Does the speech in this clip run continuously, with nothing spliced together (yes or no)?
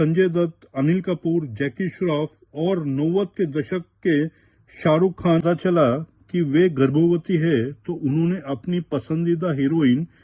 no